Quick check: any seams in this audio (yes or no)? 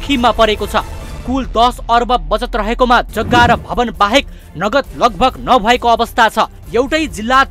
no